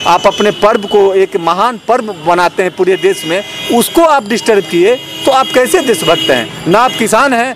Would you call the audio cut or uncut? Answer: uncut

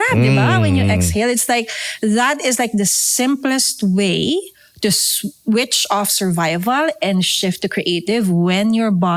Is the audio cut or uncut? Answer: uncut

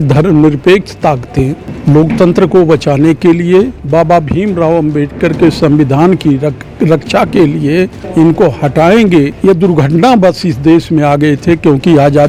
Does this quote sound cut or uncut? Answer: uncut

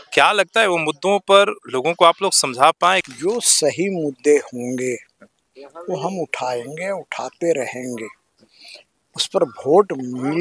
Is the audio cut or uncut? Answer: cut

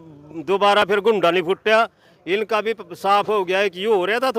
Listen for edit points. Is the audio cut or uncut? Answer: uncut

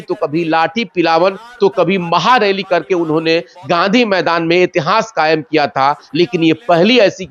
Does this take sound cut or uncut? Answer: uncut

